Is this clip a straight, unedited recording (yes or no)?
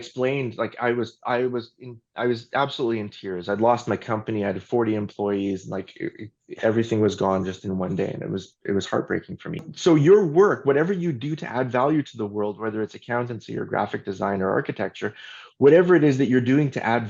no